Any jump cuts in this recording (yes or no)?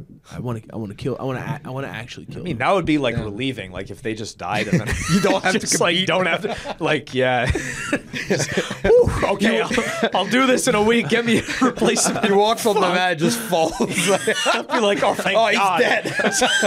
no